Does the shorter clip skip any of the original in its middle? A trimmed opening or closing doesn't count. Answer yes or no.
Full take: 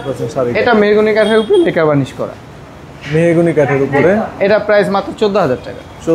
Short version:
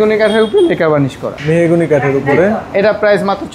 yes